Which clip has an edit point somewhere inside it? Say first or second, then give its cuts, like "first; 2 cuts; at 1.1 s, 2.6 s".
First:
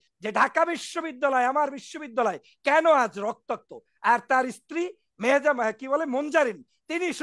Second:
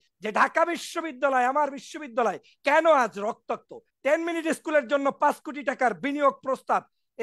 second; 1 cut; at 3.8 s